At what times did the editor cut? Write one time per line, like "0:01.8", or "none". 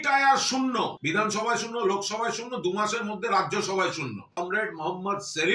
0:01.0
0:04.3